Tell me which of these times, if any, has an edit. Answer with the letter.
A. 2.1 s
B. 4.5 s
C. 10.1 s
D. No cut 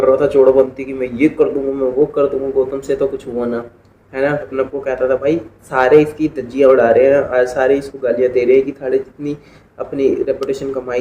B